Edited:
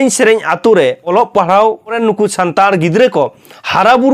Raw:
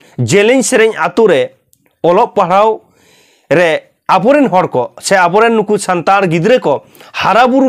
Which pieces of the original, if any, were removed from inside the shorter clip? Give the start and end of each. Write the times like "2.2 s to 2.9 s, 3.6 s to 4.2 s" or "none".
1.6 s to 2.1 s, 3.0 s to 5.5 s